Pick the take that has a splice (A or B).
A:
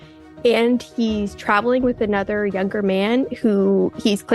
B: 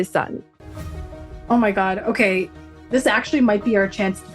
B